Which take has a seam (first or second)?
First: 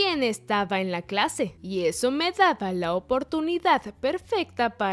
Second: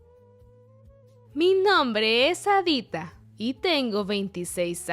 second